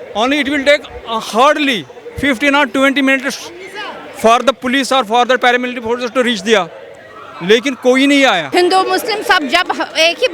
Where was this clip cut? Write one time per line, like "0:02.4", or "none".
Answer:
0:08.5

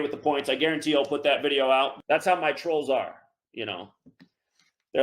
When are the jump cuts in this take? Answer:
0:01.9

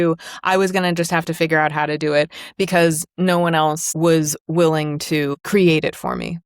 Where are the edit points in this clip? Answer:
0:03.9
0:05.4

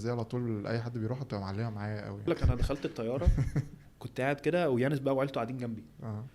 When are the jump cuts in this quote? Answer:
0:02.3
0:04.0

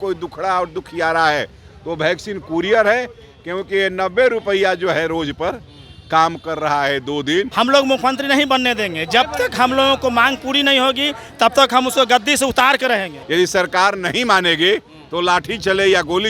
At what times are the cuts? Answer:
0:07.5
0:13.2

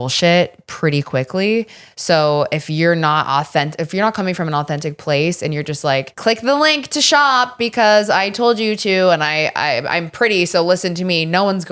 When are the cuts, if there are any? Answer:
0:06.1

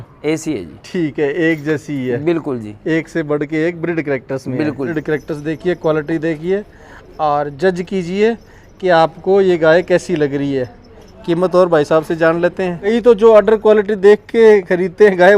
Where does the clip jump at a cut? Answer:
0:04.9
0:12.9

